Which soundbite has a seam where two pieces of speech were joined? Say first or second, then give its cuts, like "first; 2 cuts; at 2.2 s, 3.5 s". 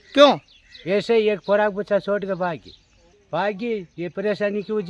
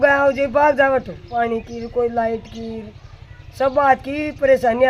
second; 1 cut; at 1.4 s